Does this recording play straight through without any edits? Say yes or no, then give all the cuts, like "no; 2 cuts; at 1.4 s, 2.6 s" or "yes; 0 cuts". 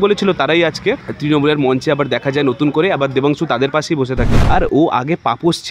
no; 2 cuts; at 1.1 s, 4.3 s